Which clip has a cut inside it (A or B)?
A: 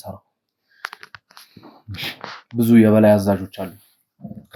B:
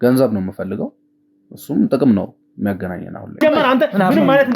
B